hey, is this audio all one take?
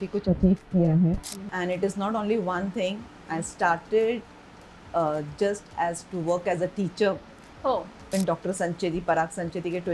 no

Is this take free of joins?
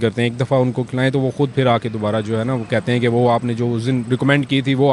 yes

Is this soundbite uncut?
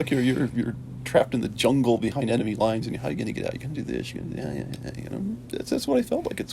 yes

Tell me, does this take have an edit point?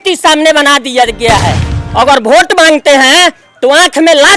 yes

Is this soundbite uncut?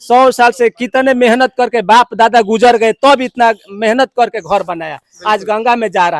yes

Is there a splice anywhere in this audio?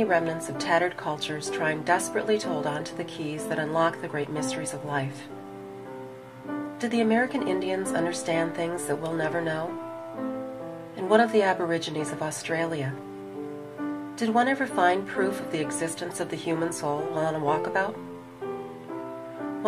yes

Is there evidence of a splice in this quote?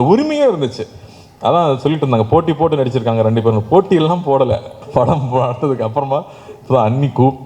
yes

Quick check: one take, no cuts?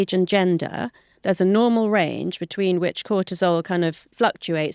yes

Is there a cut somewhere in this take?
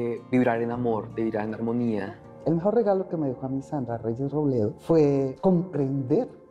yes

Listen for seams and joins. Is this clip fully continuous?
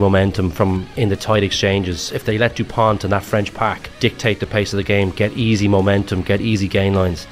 no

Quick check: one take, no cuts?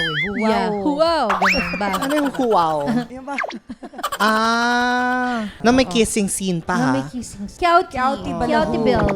no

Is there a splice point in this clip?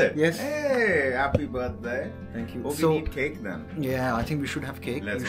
no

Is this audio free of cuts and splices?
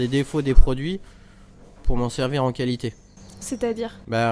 yes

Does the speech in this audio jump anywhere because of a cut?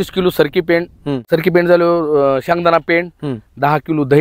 yes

